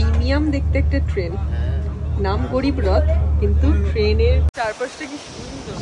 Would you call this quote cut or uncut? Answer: cut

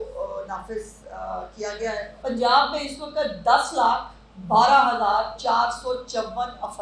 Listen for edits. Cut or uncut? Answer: cut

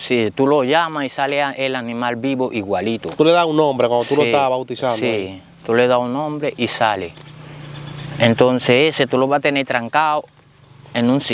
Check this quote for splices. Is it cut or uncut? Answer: uncut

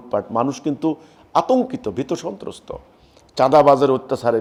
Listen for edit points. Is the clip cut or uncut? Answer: uncut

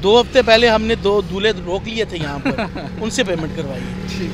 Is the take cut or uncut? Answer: uncut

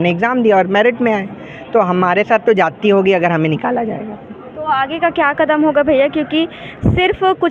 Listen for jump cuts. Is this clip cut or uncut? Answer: uncut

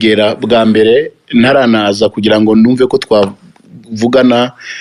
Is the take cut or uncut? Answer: uncut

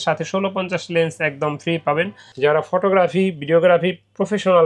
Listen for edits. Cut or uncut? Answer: cut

